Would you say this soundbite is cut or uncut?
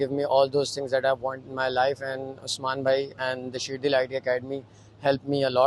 uncut